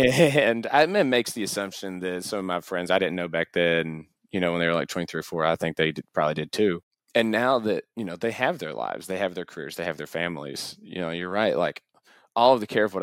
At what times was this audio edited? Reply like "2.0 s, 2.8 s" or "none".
6.9 s, 7.9 s